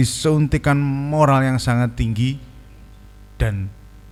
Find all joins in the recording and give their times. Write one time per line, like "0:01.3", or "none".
none

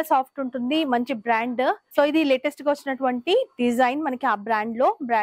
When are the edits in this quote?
0:01.8

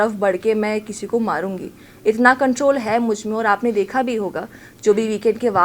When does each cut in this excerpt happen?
none

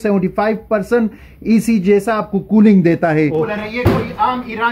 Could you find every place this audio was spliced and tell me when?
0:03.4

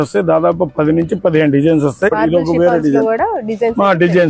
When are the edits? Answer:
0:02.2

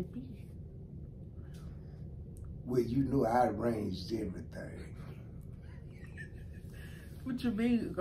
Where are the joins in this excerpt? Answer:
none

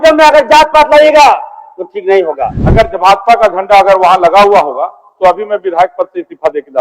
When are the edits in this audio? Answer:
0:02.6

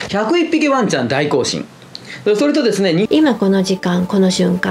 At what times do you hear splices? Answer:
0:03.1

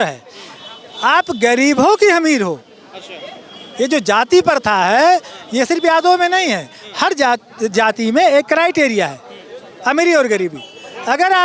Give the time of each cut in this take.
none

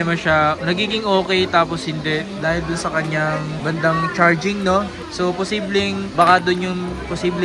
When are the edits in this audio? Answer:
none

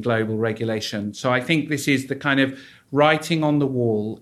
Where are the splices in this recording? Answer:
none

